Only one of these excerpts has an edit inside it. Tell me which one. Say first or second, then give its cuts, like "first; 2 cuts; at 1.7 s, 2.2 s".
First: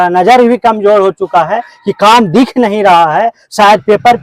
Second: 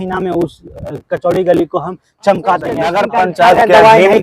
second; 1 cut; at 2.9 s